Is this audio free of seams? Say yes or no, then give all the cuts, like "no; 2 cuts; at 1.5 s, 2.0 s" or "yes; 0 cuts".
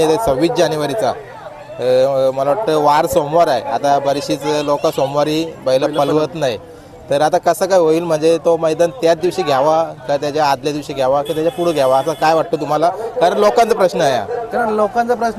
yes; 0 cuts